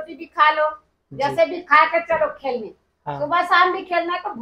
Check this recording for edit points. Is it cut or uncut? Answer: uncut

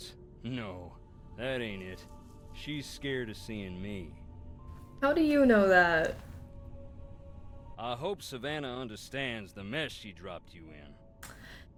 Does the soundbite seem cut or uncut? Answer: uncut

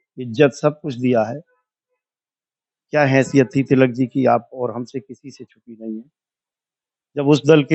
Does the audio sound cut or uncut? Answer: uncut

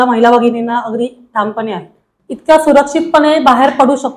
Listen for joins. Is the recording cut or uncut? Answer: cut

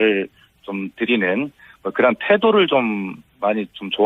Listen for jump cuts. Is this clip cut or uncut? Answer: cut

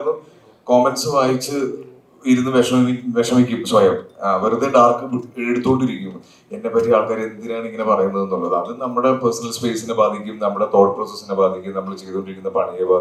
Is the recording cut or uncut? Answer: uncut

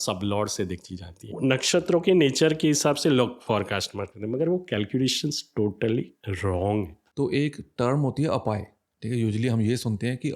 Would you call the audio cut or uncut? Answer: cut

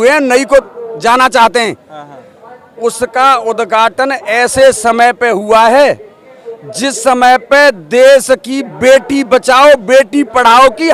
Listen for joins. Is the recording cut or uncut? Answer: uncut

